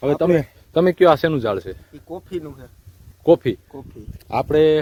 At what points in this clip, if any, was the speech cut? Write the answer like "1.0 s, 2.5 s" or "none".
none